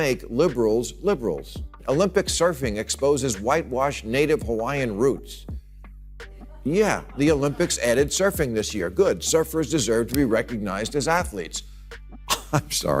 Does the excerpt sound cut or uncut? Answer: cut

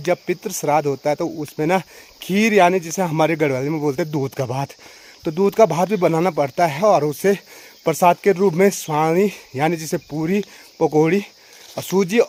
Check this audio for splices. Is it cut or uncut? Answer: uncut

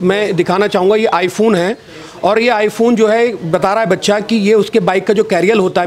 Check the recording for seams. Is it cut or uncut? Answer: uncut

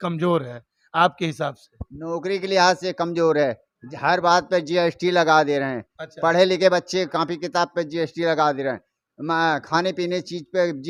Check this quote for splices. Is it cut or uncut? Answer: uncut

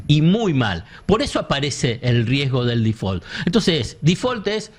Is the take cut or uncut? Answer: uncut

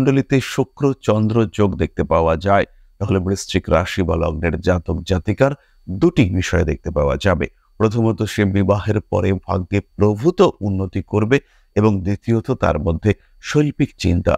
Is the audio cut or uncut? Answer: uncut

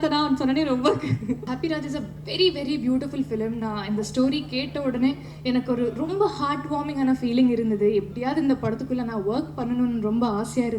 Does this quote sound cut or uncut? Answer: cut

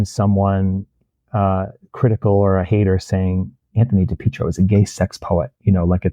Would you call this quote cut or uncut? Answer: uncut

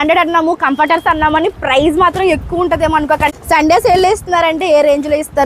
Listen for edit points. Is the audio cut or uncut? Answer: cut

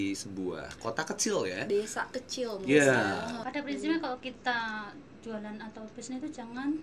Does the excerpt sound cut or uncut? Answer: cut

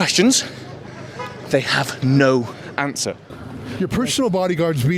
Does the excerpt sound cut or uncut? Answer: cut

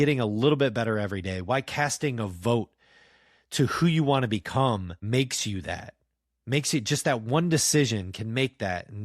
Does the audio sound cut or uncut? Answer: cut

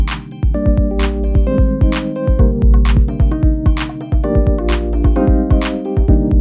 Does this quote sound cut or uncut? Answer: uncut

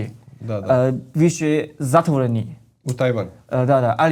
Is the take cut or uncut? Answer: uncut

